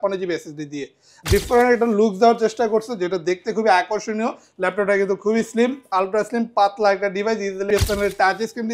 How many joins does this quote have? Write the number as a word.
two